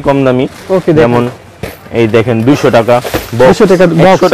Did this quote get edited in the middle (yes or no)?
no